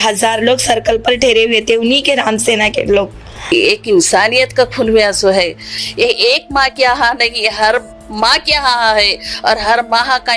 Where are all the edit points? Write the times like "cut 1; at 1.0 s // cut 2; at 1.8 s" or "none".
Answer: cut 1; at 3.4 s